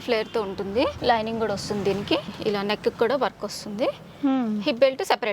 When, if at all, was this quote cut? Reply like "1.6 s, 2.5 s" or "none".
1.0 s, 2.3 s